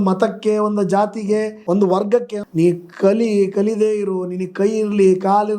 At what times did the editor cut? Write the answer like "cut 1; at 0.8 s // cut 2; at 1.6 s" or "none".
cut 1; at 1.6 s // cut 2; at 2.4 s